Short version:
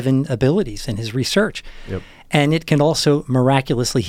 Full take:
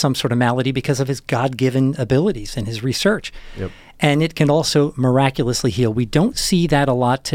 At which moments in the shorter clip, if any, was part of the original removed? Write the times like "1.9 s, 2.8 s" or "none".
none